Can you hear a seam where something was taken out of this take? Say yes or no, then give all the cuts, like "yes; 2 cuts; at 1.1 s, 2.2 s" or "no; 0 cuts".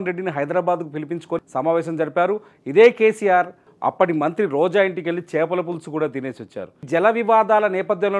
yes; 3 cuts; at 1.4 s, 3.7 s, 6.8 s